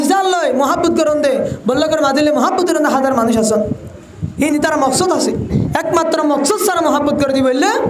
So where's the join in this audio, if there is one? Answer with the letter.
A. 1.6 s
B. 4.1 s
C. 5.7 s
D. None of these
C